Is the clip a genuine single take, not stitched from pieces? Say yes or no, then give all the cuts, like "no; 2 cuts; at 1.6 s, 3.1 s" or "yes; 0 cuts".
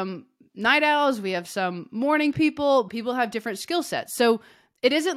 no; 1 cut; at 2.9 s